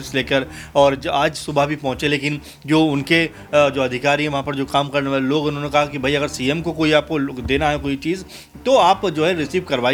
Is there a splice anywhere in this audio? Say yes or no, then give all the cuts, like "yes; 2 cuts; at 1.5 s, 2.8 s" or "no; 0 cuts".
no; 0 cuts